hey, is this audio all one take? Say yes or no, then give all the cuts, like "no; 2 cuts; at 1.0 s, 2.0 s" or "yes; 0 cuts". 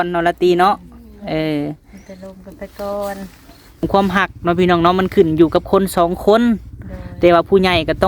no; 1 cut; at 3.9 s